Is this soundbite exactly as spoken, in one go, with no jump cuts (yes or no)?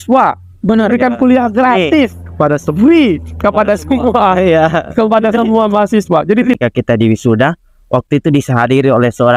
no